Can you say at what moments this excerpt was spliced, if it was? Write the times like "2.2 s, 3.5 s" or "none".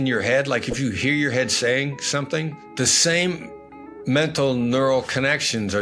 none